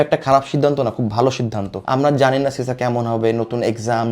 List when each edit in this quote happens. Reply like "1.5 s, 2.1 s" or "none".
1.9 s